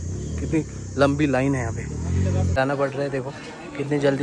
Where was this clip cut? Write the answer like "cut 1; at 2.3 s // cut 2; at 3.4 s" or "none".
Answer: cut 1; at 2.6 s